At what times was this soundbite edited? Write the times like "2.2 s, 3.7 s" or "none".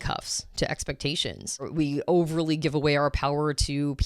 1.7 s